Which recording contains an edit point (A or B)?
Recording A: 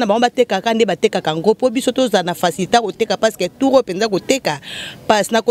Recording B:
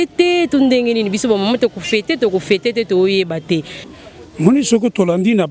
B